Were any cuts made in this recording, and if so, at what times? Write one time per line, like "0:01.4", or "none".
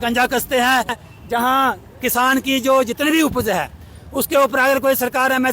0:01.0